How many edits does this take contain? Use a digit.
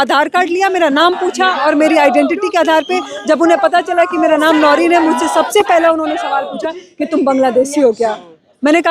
0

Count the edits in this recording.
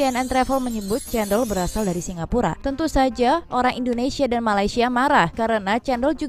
0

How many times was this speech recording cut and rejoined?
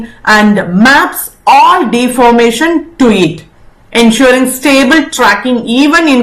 0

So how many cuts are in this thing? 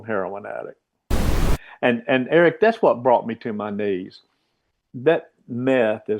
1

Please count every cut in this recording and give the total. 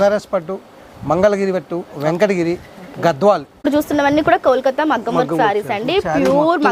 1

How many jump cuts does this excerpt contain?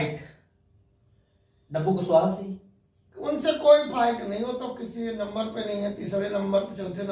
0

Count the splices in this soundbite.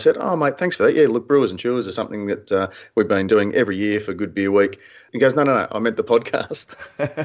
1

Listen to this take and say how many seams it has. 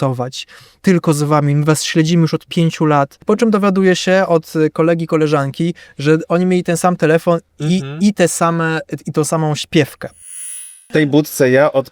2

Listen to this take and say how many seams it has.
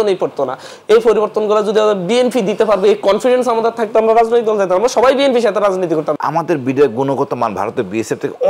1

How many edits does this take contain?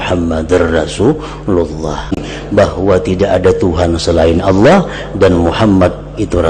1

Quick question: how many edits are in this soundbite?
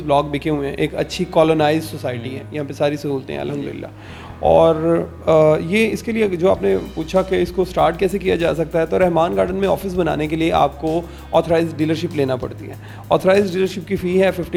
0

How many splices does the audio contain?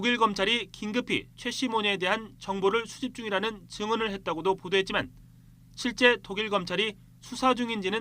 1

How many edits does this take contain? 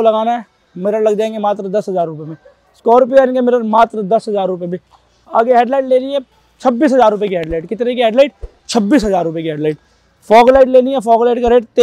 0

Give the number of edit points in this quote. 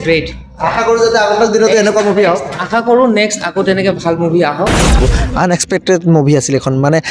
1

